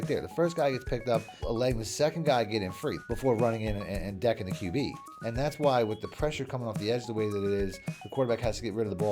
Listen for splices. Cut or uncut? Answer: cut